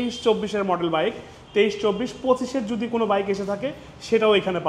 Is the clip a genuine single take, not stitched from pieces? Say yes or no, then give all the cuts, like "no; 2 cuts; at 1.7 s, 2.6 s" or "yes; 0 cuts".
yes; 0 cuts